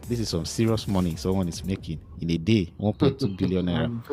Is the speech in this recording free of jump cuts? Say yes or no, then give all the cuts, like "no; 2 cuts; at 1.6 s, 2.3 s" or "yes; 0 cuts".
yes; 0 cuts